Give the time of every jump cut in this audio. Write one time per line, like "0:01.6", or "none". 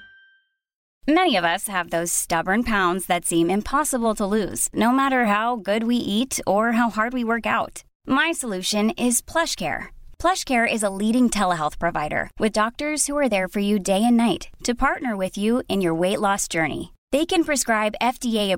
0:00.9